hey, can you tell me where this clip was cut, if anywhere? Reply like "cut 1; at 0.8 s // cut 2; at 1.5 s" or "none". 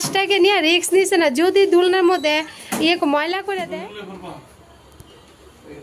cut 1; at 3.7 s

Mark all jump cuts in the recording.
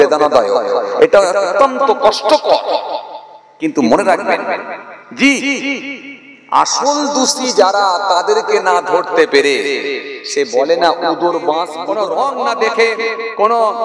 cut 1; at 11.8 s

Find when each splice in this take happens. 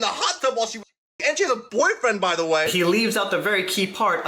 cut 1; at 2.7 s

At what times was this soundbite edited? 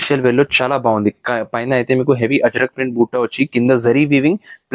none

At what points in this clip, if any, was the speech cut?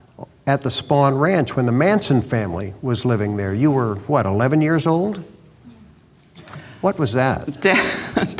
none

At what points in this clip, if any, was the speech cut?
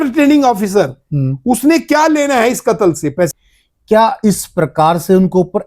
cut 1; at 3.3 s

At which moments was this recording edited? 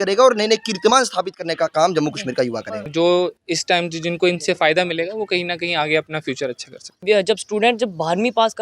cut 1; at 2.9 s // cut 2; at 7.0 s

